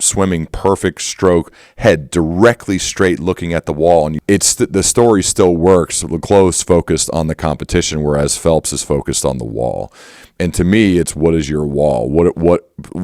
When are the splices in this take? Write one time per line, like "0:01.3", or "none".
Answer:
0:04.2